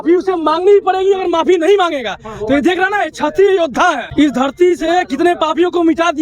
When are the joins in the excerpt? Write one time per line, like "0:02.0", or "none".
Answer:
none